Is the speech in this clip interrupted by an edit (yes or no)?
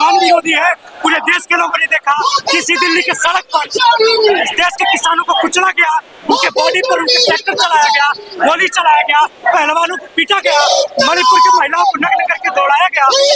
no